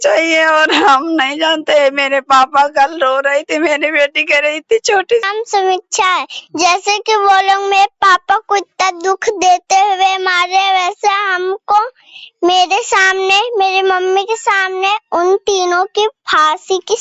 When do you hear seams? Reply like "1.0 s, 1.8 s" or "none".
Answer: 5.2 s